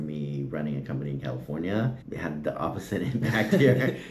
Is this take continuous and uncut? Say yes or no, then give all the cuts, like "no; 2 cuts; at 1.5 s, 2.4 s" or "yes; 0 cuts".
no; 1 cut; at 2.0 s